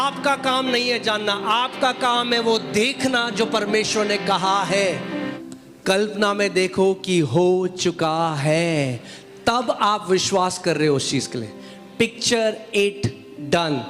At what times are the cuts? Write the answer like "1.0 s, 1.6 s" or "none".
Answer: 5.3 s